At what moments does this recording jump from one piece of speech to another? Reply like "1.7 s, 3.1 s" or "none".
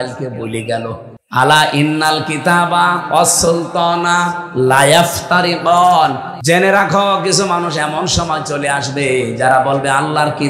1.1 s, 6.3 s